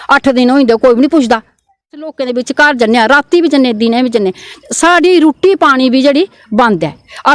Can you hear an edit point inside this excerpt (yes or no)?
yes